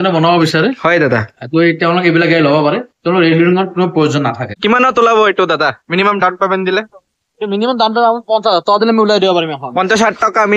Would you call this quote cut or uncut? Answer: cut